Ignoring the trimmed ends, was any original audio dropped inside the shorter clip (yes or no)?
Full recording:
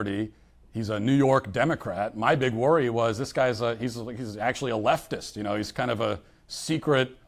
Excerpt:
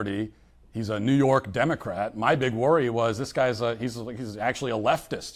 no